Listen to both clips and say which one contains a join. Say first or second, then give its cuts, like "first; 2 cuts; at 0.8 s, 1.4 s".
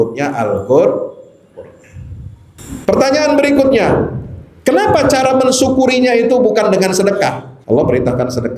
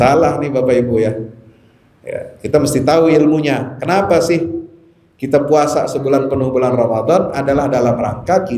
first; 2 cuts; at 2.6 s, 7.5 s